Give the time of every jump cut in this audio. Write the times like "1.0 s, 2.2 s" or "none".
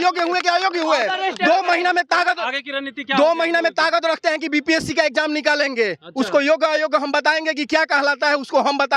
none